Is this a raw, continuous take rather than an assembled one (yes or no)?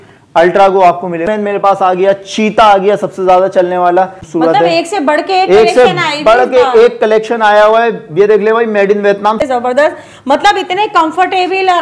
no